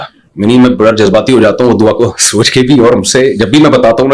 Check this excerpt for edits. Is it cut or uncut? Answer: uncut